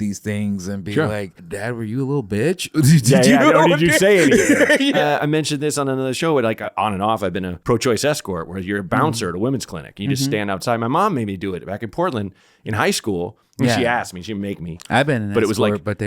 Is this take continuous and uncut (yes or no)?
no